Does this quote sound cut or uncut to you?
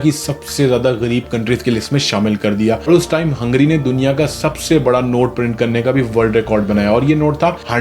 cut